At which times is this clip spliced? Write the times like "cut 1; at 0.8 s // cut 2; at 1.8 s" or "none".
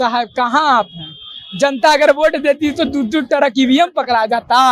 none